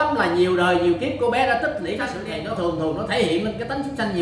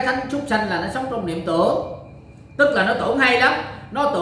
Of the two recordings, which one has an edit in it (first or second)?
first